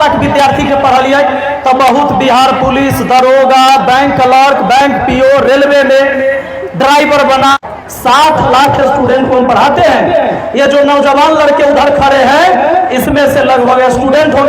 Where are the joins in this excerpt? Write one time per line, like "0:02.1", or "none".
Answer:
0:07.7